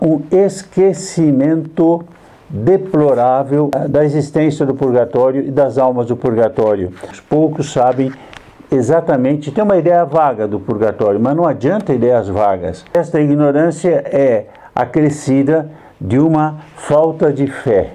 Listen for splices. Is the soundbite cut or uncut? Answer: cut